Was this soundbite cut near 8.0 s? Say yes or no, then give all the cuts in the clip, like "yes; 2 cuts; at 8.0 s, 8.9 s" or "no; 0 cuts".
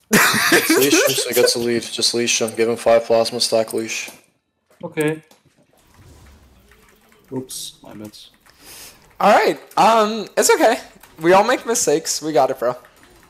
no; 1 cut; at 5.9 s